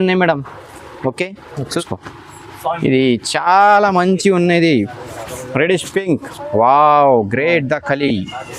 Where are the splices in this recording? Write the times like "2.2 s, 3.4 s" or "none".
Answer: 1.7 s

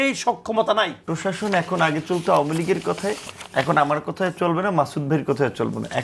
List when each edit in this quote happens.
1.0 s

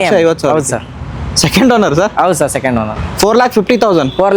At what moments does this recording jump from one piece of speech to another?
none

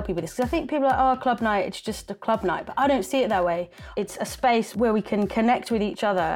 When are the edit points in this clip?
3.8 s, 4.7 s

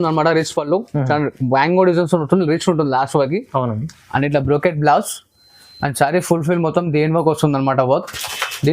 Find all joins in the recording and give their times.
none

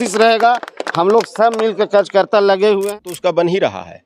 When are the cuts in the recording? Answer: 3.0 s

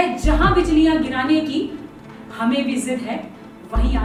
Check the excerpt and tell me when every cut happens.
none

